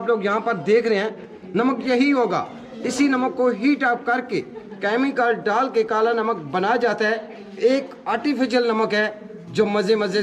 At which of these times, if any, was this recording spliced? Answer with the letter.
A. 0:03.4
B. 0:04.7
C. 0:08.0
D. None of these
D